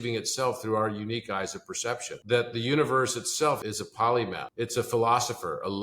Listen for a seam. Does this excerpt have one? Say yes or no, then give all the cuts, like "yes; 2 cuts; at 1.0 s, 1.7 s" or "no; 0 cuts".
yes; 3 cuts; at 2.1 s, 3.6 s, 4.5 s